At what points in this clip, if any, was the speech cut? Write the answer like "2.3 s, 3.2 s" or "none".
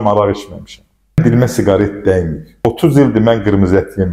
1.2 s, 2.7 s